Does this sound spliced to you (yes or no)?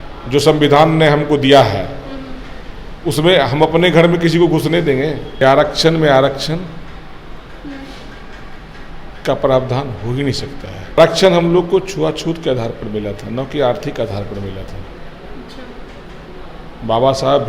yes